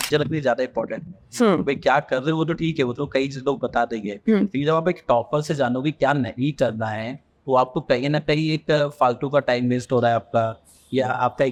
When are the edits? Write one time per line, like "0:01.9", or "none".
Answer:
none